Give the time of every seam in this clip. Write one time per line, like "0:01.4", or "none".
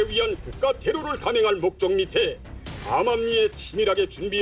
0:02.4